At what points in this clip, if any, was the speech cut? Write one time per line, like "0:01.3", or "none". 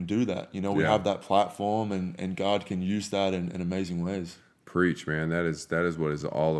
none